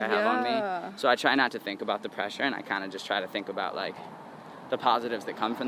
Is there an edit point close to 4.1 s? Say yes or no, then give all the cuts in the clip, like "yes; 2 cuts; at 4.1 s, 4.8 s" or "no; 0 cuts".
no; 0 cuts